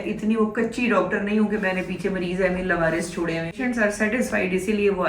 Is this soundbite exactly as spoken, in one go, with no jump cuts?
no; 1 cut; at 3.6 s

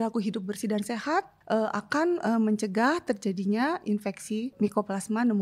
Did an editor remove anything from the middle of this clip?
yes; 2 cuts; at 1.4 s, 4.5 s

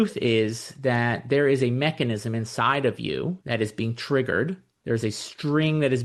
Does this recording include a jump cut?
yes; 2 cuts; at 3.4 s, 4.7 s

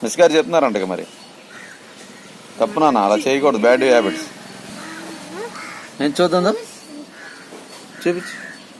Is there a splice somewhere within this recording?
no; 0 cuts

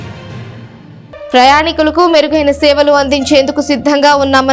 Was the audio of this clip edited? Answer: yes; 1 cut; at 1.3 s

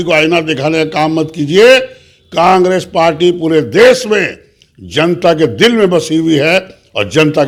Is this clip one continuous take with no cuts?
yes; 0 cuts

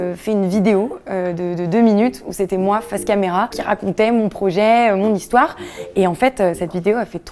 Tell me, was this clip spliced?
yes; 1 cut; at 3.6 s

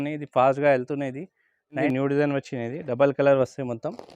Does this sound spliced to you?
yes; 1 cut; at 1.8 s

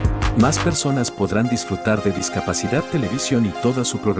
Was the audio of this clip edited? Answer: no; 0 cuts

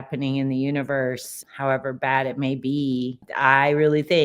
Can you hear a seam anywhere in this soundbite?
yes; 2 cuts; at 1.4 s, 3.2 s

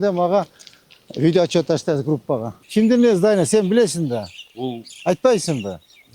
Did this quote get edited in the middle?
yes; 1 cut; at 2.6 s

